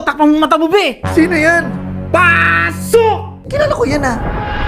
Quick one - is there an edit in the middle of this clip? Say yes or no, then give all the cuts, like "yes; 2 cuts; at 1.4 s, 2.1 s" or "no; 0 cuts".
yes; 1 cut; at 3.5 s